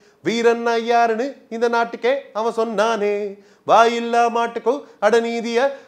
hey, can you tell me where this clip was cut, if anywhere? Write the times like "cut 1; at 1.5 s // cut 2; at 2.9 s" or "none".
none